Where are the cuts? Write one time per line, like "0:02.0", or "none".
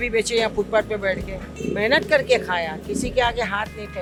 none